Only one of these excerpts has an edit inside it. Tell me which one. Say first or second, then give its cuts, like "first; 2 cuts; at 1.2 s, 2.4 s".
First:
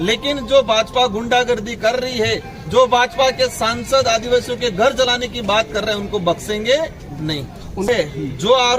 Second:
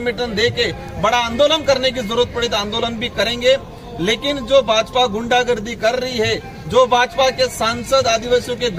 first; 1 cut; at 7.9 s